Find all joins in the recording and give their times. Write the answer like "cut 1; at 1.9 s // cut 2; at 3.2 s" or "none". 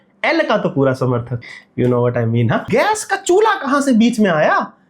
cut 1; at 1.4 s // cut 2; at 2.6 s